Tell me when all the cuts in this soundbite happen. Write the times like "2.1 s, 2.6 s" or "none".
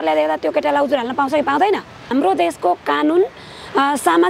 2.1 s